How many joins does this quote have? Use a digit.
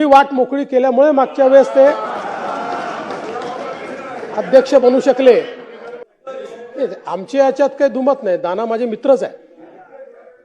1